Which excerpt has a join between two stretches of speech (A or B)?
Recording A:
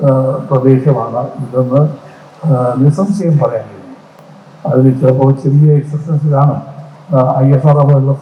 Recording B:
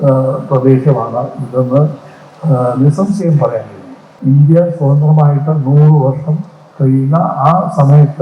B